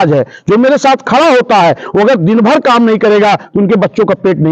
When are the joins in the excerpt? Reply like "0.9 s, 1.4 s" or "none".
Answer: none

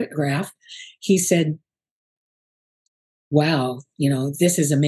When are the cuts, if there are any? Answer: none

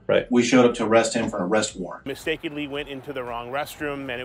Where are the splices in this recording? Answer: 1.9 s

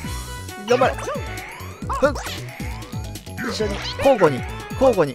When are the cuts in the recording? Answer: none

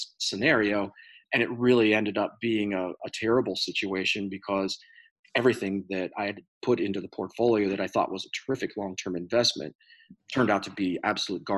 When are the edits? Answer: none

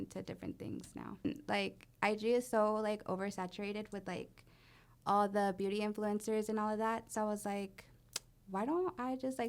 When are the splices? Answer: 1.3 s

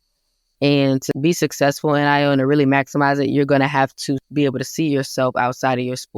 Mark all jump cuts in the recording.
1.0 s, 4.2 s

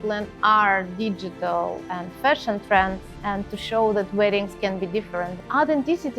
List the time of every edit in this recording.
1.8 s, 3.1 s, 5.4 s

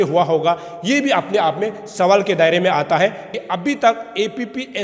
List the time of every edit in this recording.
3.3 s

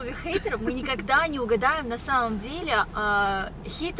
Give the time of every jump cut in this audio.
none

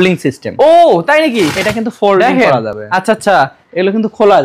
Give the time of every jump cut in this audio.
none

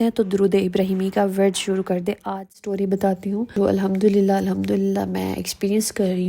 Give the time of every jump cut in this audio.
2.6 s

